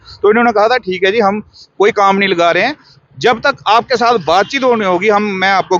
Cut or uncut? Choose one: uncut